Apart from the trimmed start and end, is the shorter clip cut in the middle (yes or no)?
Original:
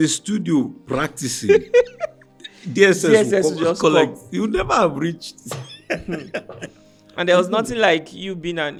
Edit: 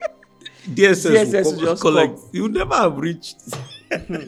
no